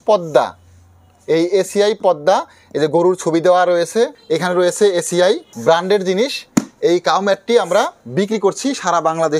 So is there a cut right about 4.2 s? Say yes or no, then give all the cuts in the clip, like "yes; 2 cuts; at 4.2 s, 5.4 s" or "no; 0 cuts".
yes; 3 cuts; at 4.2 s, 5.5 s, 8.0 s